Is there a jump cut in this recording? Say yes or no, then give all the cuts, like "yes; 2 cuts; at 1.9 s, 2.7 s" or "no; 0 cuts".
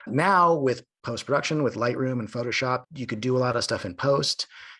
no; 0 cuts